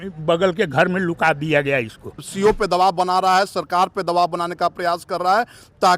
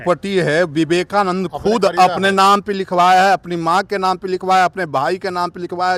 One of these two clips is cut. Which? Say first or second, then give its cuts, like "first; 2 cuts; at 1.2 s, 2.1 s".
first; 1 cut; at 2.3 s